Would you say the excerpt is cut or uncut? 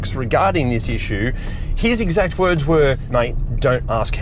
cut